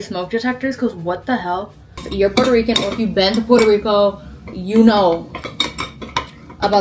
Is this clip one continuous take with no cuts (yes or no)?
no